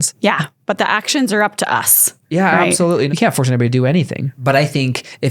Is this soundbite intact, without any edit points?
no; 2 cuts; at 3.1 s, 4.2 s

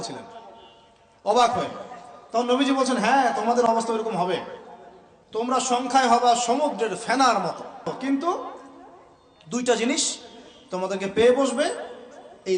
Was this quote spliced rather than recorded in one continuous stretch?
yes; 1 cut; at 7.9 s

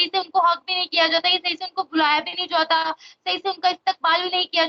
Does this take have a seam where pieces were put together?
no; 0 cuts

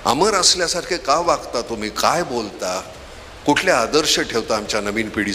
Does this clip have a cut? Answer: no; 0 cuts

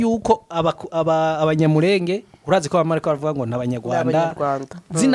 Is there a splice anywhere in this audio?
no; 0 cuts

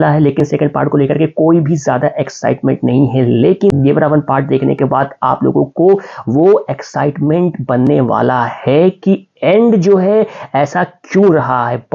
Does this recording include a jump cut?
no; 0 cuts

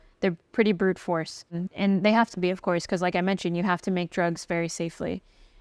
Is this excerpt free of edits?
no; 1 cut; at 1.6 s

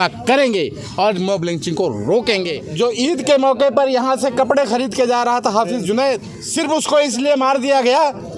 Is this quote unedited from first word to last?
no; 2 cuts; at 2.6 s, 6.4 s

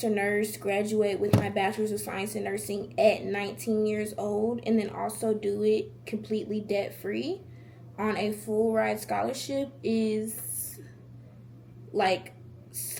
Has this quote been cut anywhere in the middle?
no; 0 cuts

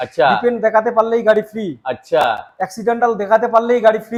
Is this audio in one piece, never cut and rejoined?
yes; 0 cuts

